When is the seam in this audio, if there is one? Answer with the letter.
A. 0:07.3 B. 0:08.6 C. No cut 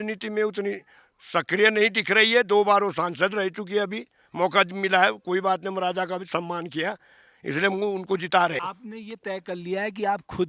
B